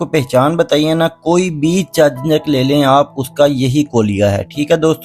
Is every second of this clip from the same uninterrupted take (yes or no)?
yes